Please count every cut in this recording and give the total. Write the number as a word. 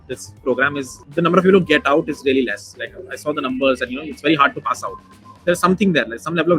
one